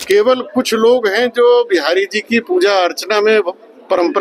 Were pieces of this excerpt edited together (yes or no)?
no